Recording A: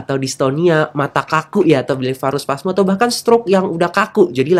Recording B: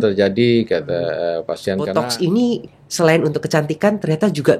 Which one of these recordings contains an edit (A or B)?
B